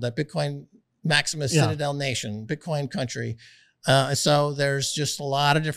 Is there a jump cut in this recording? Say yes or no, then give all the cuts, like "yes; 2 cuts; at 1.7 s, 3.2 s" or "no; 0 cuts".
no; 0 cuts